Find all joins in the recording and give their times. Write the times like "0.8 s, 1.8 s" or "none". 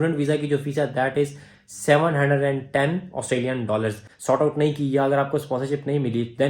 4.1 s